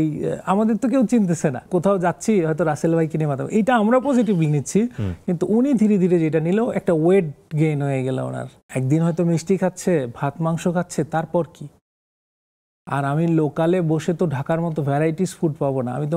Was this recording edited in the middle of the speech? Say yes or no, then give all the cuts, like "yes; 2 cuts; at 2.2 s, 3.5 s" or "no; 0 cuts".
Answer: yes; 2 cuts; at 1.6 s, 8.5 s